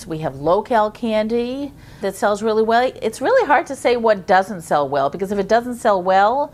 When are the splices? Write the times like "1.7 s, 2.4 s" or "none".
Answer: none